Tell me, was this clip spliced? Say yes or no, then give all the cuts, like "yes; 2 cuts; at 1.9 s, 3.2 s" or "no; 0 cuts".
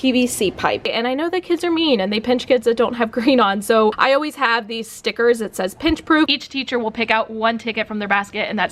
yes; 2 cuts; at 0.9 s, 6.3 s